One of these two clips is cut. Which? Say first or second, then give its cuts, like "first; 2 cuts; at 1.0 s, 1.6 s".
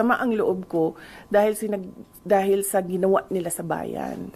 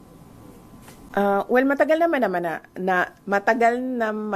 second; 1 cut; at 1.0 s